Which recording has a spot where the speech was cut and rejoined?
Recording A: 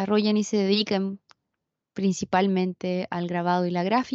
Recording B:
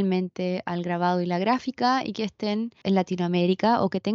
B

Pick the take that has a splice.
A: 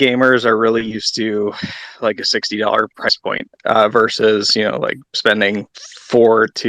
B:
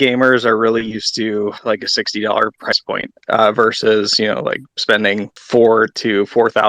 B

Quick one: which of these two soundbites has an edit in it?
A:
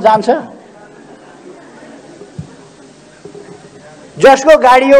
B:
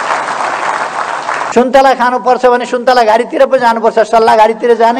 B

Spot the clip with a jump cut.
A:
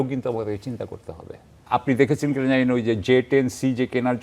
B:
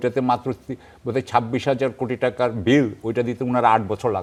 A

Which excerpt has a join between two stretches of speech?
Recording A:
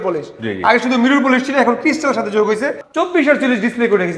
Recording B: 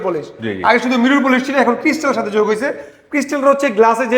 A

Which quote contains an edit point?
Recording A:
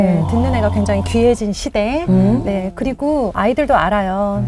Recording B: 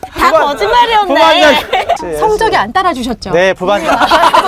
B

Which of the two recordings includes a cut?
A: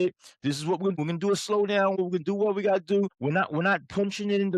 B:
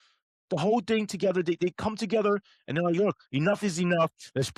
A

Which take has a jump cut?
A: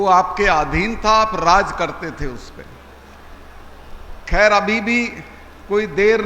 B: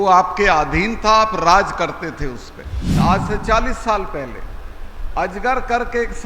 B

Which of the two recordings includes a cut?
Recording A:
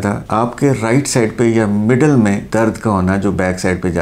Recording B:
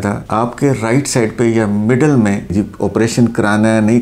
B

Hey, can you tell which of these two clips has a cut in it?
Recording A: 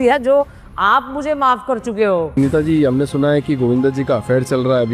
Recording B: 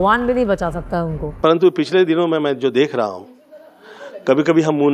B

